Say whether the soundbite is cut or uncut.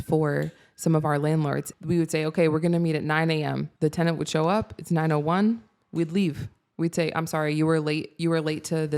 cut